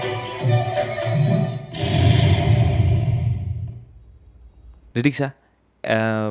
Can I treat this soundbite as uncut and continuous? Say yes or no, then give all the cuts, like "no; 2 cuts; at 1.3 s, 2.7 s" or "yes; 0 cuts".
yes; 0 cuts